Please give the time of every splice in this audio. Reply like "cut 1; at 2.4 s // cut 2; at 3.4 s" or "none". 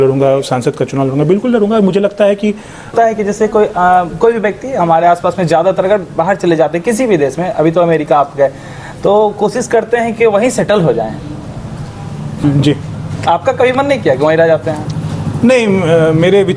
cut 1; at 2.9 s // cut 2; at 12.4 s